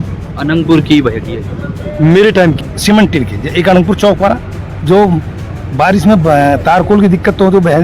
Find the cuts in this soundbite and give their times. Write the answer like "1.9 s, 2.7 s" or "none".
2.7 s